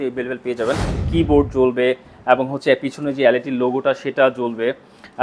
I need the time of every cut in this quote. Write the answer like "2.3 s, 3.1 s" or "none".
0.9 s